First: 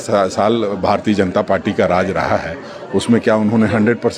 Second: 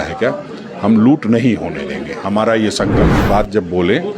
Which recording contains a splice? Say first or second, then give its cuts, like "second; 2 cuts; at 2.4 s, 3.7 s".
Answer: second; 1 cut; at 3.2 s